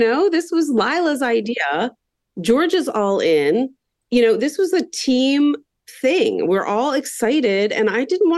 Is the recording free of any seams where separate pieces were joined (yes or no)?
yes